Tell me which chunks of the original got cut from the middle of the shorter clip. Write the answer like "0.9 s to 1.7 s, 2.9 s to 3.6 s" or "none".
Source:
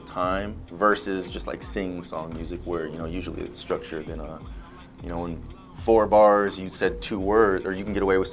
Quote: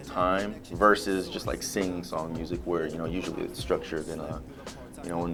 none